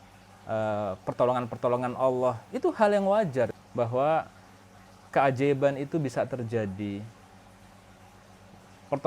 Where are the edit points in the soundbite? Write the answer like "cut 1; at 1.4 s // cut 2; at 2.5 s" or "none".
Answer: cut 1; at 2.5 s // cut 2; at 3.5 s